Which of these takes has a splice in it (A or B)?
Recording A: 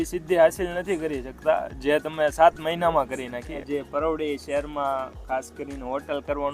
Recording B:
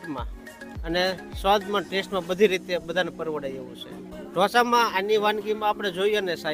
A